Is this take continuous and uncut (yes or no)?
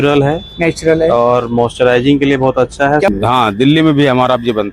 no